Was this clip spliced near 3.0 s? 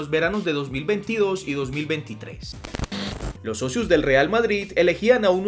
yes; 1 cut; at 3.0 s

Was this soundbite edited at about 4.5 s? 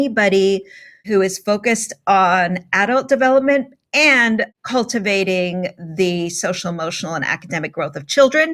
yes; 2 cuts; at 1.0 s, 4.5 s

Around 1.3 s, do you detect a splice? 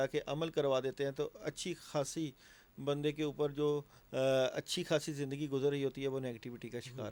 no; 0 cuts

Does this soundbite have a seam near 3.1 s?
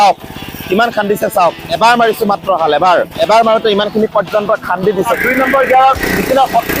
yes; 3 cuts; at 1.6 s, 3.1 s, 5.1 s

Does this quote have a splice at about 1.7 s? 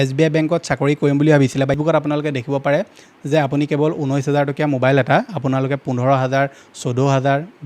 yes; 1 cut; at 1.7 s

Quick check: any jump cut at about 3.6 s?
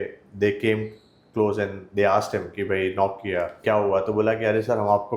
yes; 1 cut; at 3.6 s

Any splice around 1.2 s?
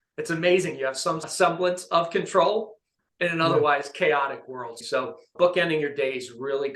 yes; 2 cuts; at 1.2 s, 4.7 s

